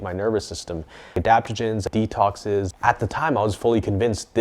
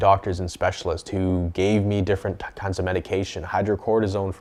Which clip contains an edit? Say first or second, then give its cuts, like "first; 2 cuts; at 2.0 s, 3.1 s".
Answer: first; 3 cuts; at 1.1 s, 1.9 s, 2.7 s